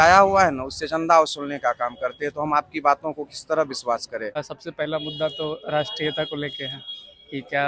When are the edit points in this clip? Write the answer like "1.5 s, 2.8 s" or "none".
4.5 s